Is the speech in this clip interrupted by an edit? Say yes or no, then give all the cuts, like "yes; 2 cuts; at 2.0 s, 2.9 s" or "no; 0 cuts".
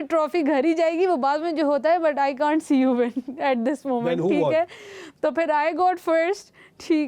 no; 0 cuts